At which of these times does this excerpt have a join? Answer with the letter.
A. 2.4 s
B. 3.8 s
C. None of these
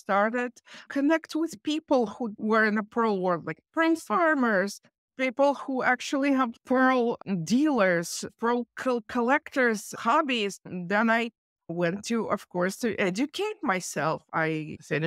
A